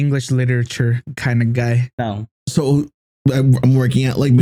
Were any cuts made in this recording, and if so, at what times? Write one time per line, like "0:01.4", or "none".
none